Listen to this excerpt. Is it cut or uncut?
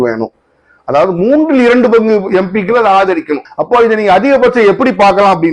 cut